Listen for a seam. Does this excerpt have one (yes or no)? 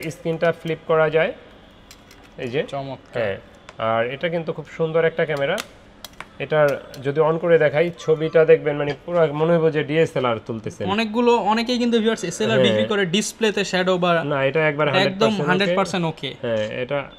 no